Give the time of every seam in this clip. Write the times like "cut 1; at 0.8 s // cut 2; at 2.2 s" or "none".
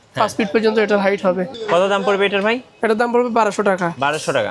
none